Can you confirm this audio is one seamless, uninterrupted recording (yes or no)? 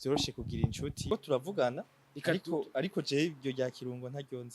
no